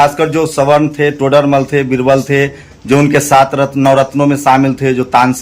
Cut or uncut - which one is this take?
uncut